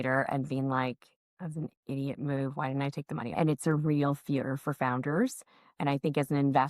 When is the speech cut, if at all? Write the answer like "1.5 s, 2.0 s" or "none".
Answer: 3.3 s